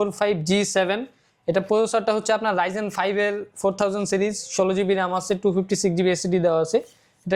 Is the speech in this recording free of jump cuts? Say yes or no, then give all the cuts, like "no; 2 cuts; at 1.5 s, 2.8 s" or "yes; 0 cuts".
yes; 0 cuts